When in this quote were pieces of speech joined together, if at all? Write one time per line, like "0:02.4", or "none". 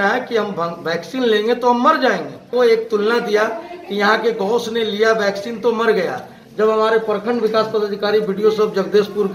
0:02.5